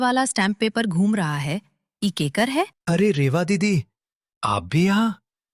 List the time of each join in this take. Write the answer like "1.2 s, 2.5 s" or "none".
2.8 s